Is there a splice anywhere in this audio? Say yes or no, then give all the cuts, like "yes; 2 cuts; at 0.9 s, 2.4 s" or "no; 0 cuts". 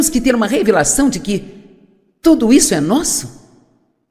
no; 0 cuts